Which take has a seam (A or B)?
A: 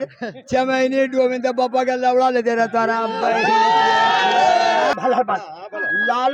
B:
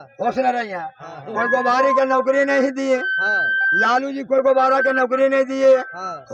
A